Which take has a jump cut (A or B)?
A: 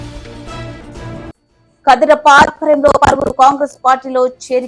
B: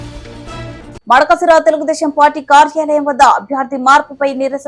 A